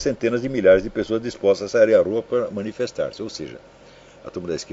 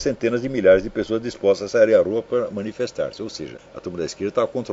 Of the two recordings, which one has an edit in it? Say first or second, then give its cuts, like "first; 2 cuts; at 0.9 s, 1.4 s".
second; 1 cut; at 3.6 s